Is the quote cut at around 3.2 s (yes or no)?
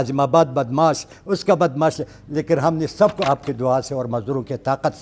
yes